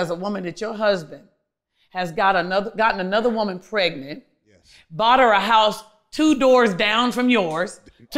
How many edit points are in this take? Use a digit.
0